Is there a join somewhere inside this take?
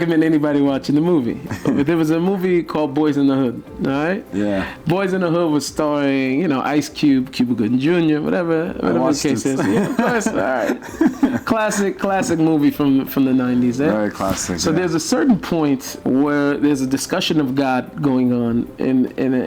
yes; 1 cut; at 15.9 s

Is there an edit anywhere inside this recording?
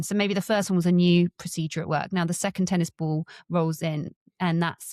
no; 0 cuts

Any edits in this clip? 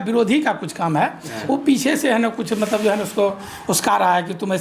no; 0 cuts

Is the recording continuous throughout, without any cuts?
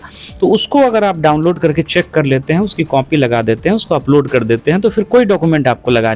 yes; 0 cuts

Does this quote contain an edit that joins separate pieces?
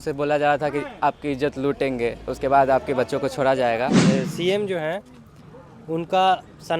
yes; 1 cut; at 4.0 s

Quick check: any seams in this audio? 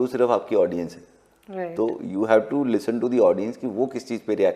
no; 0 cuts

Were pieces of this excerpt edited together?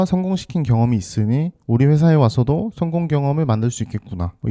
no; 0 cuts

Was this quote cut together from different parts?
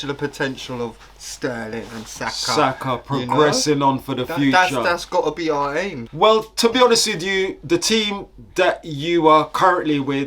no; 0 cuts

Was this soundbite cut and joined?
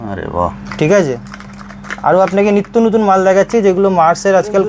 no; 0 cuts

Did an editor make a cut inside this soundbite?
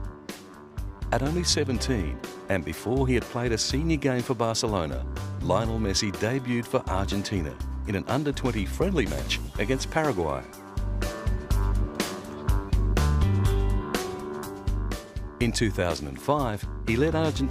yes; 1 cut; at 2.0 s

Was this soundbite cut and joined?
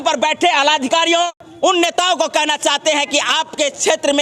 yes; 1 cut; at 1.3 s

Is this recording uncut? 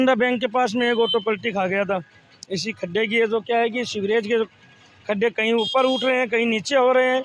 yes; 0 cuts

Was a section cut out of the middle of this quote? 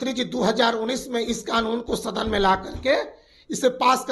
no; 0 cuts

